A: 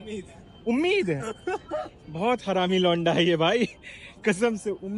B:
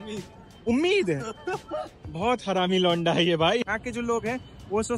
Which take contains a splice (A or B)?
B